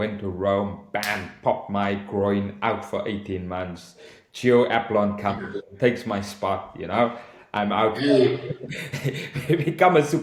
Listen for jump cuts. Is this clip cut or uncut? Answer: uncut